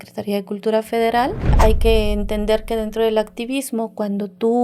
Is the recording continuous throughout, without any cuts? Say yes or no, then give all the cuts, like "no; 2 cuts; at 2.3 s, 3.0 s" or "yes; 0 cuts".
no; 1 cut; at 1.4 s